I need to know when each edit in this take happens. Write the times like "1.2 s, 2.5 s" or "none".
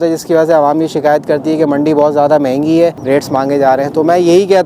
3.0 s